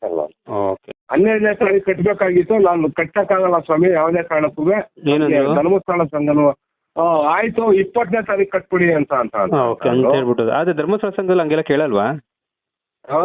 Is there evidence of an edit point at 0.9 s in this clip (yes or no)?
yes